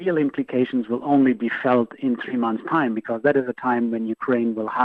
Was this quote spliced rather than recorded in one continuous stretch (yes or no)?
no